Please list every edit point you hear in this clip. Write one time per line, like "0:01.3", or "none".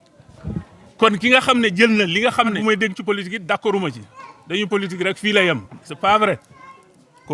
0:02.6